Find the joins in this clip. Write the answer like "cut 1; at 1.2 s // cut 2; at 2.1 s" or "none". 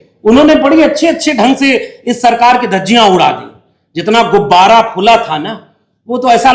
none

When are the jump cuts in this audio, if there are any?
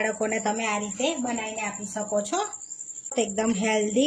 cut 1; at 3.1 s

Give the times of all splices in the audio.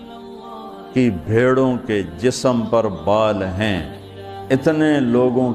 none

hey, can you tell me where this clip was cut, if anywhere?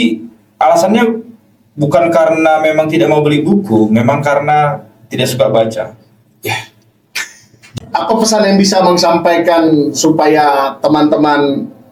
cut 1; at 7.7 s

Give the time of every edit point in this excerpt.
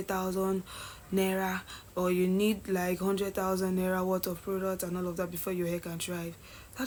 none

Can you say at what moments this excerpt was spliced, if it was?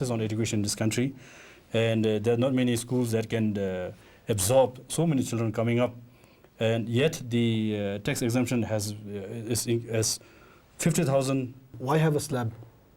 cut 1; at 11.7 s

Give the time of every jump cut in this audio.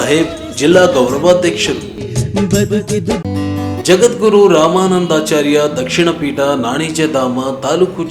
cut 1; at 3.3 s

